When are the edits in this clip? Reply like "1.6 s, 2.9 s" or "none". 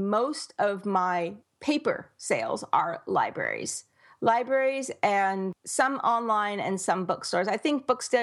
1.5 s, 5.6 s